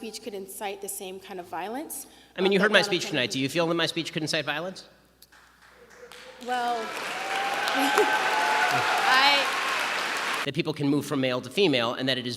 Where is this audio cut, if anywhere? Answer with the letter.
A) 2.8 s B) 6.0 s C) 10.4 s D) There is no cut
C